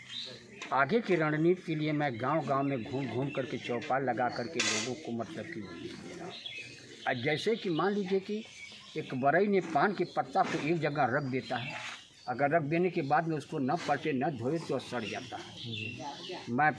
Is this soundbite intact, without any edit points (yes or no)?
yes